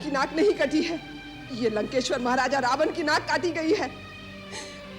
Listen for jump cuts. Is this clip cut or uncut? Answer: uncut